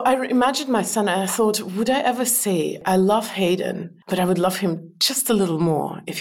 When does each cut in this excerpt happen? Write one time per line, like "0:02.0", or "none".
0:02.8
0:03.9